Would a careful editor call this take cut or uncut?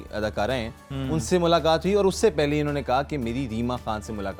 uncut